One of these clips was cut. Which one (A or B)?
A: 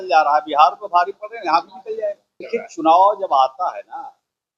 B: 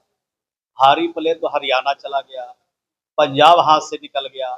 A